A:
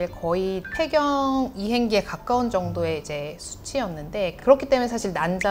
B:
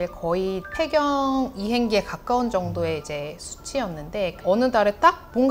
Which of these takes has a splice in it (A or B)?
B